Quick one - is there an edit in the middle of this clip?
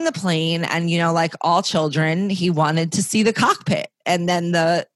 no; 0 cuts

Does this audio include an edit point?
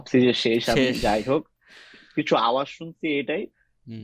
no; 0 cuts

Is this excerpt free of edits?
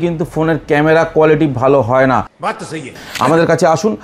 no; 1 cut; at 2.8 s

